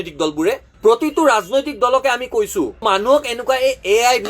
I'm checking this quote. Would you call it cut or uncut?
cut